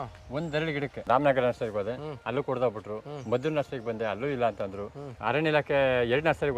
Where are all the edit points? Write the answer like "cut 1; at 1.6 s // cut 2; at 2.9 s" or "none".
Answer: cut 1; at 1.0 s // cut 2; at 5.0 s